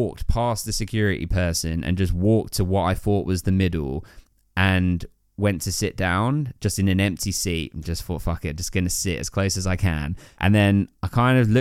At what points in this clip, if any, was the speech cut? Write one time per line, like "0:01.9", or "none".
0:10.2